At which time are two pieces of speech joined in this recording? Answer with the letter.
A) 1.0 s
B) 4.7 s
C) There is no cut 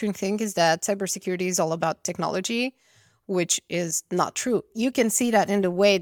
B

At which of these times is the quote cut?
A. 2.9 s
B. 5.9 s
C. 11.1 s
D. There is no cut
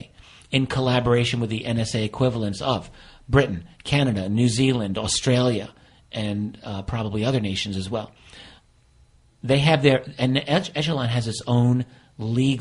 D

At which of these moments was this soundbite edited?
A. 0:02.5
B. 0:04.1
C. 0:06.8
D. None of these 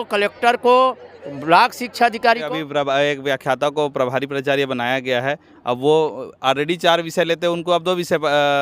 A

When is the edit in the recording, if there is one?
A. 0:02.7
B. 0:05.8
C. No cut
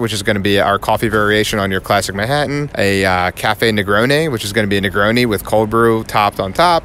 A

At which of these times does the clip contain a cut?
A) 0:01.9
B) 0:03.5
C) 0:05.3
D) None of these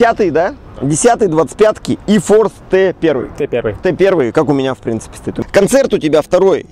C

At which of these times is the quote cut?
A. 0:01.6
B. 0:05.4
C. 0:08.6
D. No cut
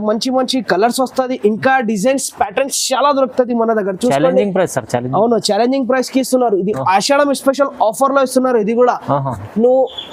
D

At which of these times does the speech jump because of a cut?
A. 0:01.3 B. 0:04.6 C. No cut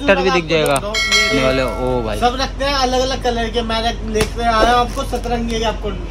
A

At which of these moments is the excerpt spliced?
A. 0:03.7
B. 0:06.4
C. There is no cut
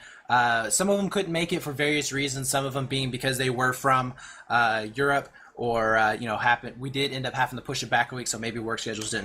B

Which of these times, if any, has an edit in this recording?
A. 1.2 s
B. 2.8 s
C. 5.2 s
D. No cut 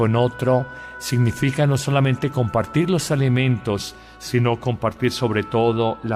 A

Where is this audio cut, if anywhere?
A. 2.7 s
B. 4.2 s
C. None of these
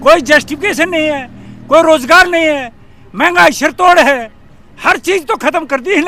C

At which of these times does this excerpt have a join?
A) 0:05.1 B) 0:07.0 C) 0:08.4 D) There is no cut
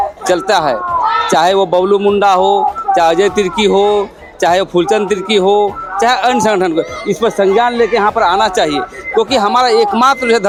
D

